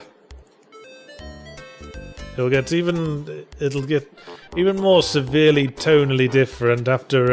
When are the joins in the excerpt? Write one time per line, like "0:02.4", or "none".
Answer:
0:04.5